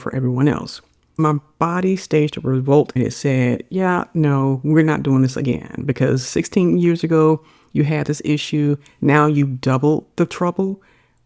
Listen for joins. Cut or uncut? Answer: uncut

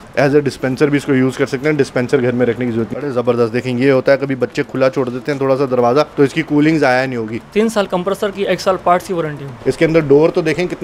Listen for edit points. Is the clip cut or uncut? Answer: cut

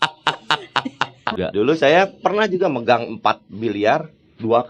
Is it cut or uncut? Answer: cut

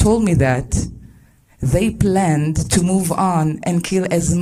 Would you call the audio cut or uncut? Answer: uncut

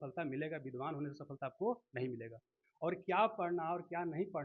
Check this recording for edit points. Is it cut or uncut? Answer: uncut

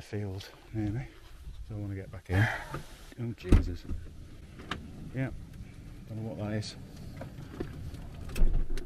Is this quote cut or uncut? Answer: uncut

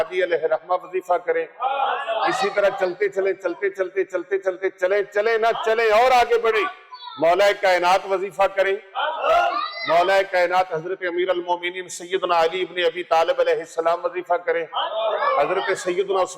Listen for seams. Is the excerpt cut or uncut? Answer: uncut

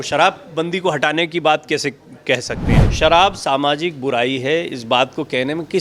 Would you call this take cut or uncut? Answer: cut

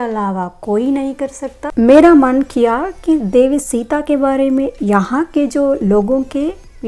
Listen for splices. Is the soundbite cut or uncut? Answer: cut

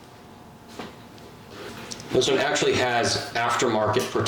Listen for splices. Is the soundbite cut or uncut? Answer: cut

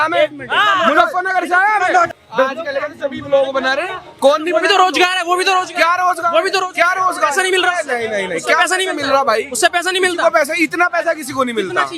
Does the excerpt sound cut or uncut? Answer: cut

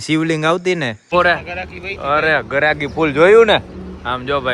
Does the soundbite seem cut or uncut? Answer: cut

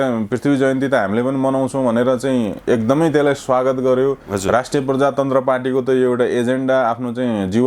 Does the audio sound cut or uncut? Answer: uncut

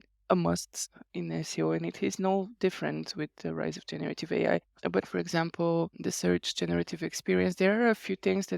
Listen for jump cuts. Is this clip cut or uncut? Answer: cut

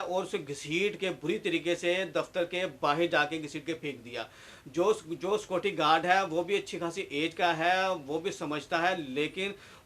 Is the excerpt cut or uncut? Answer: uncut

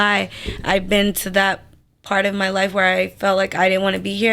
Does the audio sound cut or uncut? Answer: uncut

